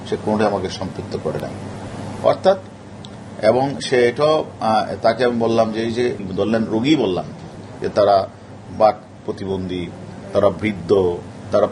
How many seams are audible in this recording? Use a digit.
1